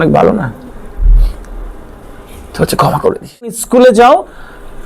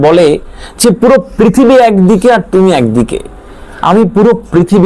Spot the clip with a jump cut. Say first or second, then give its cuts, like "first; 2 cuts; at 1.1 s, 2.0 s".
first; 1 cut; at 3.6 s